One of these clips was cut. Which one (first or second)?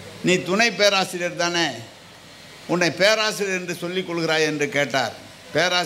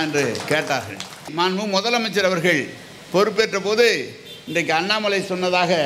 second